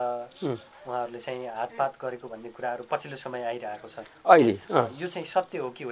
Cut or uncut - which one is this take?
uncut